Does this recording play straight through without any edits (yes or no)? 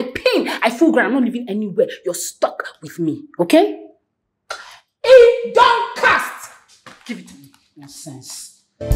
yes